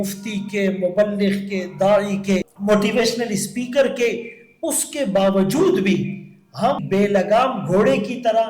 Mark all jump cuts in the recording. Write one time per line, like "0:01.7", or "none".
0:02.5
0:06.8